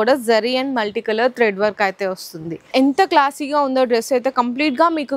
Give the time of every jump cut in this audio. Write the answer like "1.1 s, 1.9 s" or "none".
2.7 s